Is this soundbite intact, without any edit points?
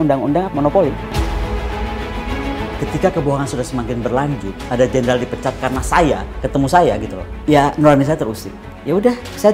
no; 2 cuts; at 1.0 s, 2.8 s

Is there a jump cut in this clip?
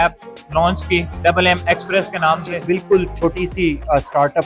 yes; 1 cut; at 2.6 s

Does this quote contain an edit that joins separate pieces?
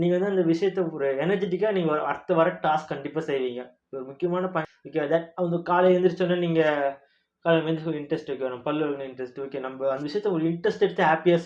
yes; 1 cut; at 4.7 s

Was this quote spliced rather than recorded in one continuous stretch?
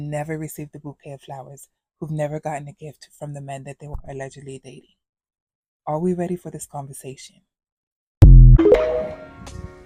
no; 0 cuts

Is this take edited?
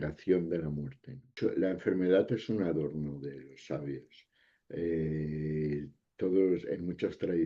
yes; 1 cut; at 1.2 s

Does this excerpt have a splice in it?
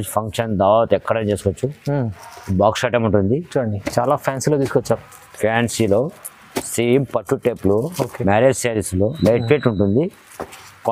no; 0 cuts

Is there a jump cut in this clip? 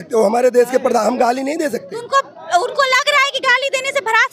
no; 0 cuts

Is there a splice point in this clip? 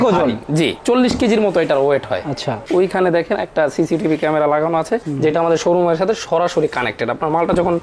yes; 1 cut; at 2.6 s

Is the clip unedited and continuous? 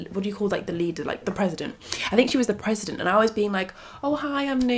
yes; 0 cuts

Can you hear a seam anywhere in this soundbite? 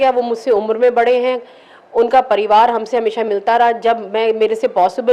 no; 0 cuts

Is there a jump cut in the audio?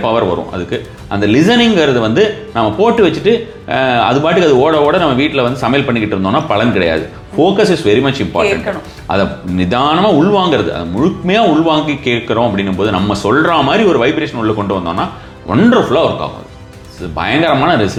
no; 0 cuts

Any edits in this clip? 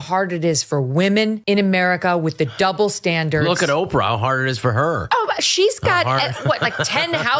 yes; 1 cut; at 1.4 s

